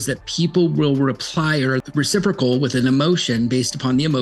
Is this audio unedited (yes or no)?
no